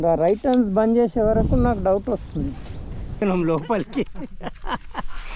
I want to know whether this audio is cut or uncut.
cut